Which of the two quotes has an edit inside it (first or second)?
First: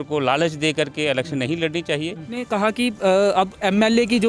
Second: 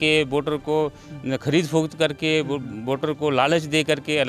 first